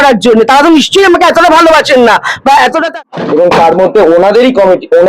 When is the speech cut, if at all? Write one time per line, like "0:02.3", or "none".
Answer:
0:02.8